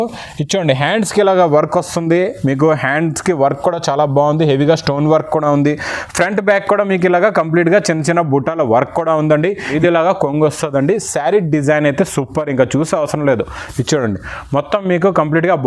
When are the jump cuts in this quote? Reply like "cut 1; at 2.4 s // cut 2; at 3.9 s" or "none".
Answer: cut 1; at 9.7 s